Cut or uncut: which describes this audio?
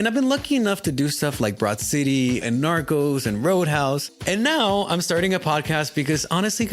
cut